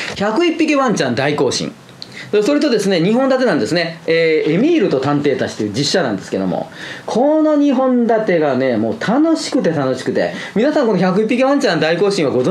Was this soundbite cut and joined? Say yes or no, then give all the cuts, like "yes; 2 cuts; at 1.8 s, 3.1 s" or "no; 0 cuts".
no; 0 cuts